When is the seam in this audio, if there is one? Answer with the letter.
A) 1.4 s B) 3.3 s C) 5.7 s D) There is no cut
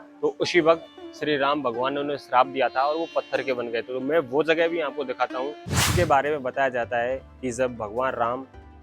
C